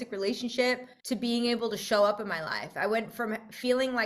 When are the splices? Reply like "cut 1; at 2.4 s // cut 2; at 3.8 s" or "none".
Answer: cut 1; at 0.9 s

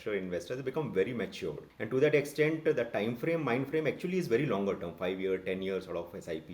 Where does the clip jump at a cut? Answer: cut 1; at 1.7 s

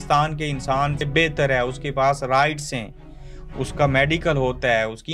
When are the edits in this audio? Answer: cut 1; at 1.0 s

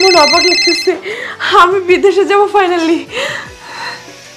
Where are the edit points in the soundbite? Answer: none

